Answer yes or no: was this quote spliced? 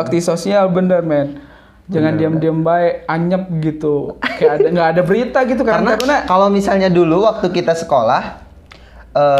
no